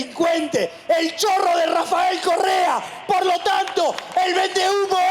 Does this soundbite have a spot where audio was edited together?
no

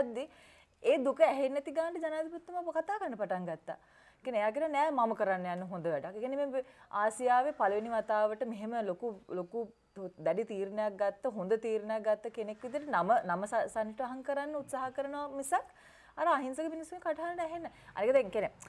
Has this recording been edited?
no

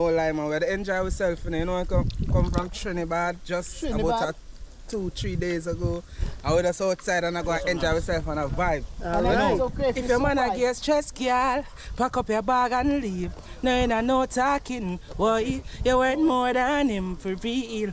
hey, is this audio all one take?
yes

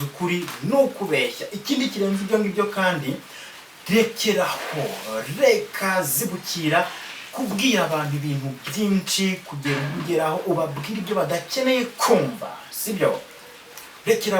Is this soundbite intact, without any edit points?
yes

